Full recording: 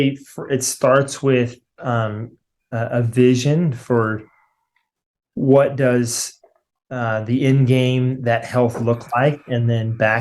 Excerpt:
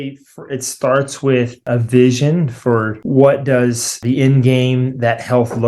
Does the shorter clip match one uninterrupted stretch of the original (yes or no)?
no